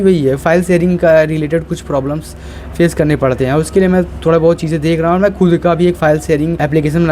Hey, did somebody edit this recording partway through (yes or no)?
no